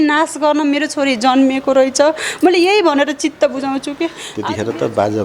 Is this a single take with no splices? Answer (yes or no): no